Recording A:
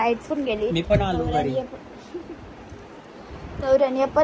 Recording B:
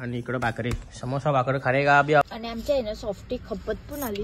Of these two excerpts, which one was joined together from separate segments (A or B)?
B